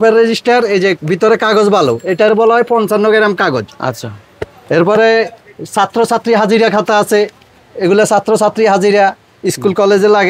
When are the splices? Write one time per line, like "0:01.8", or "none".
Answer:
none